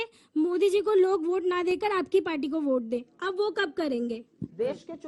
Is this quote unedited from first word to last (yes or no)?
yes